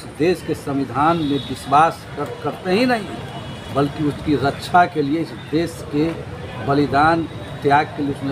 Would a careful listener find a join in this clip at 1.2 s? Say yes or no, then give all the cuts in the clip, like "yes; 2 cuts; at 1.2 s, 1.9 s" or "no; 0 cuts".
no; 0 cuts